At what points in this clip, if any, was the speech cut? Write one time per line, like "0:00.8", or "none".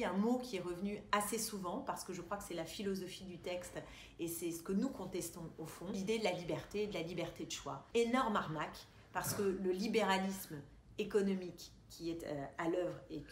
0:06.0
0:07.7